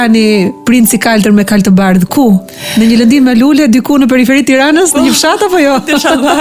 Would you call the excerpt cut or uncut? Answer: uncut